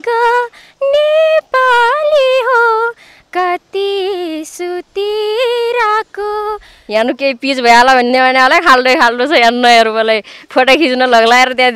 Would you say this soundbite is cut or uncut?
cut